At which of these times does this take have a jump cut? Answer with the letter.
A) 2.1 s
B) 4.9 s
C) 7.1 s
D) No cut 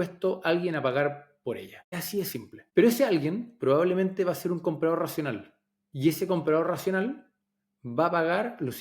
A